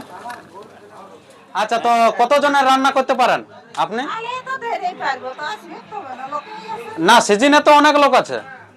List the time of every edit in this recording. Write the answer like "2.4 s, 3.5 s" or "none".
1.5 s